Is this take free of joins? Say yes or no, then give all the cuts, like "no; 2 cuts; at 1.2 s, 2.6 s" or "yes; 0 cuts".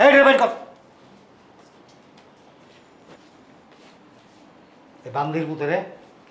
yes; 0 cuts